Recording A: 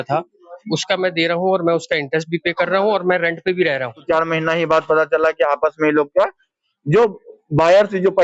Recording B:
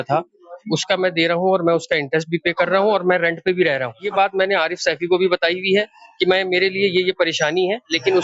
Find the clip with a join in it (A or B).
A